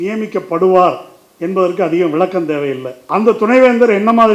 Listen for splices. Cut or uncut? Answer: cut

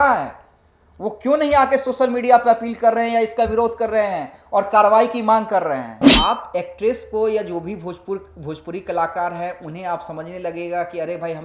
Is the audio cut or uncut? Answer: cut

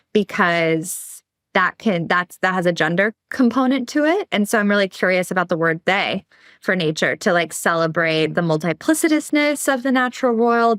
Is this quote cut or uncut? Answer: uncut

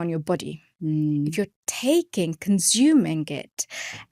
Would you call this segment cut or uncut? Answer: uncut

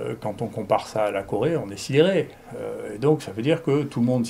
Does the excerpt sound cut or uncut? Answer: uncut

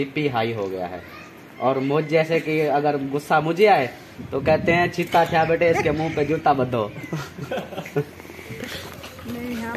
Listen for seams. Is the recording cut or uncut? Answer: uncut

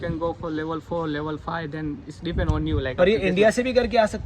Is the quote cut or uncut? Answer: uncut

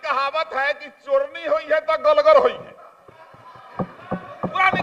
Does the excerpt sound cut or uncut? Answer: uncut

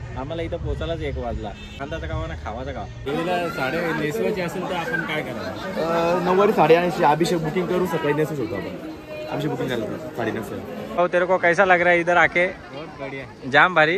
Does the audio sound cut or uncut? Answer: cut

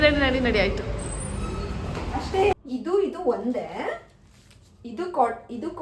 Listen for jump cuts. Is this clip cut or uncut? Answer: cut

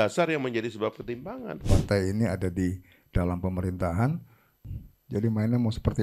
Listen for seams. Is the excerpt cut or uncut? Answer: cut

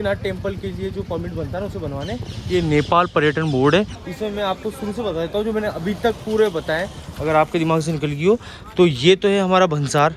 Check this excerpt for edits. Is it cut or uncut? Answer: cut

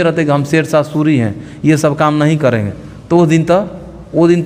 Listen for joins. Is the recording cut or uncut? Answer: uncut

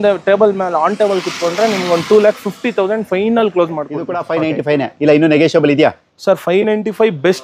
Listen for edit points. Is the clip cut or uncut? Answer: cut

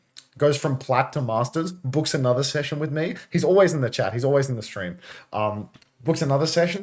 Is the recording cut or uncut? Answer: uncut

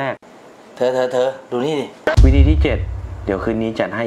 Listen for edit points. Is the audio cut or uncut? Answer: cut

